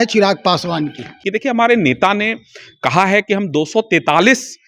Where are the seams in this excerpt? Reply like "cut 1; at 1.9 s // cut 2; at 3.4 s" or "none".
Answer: cut 1; at 1.1 s

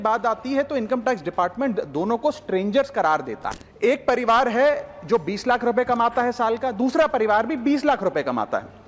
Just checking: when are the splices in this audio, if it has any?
cut 1; at 3.4 s

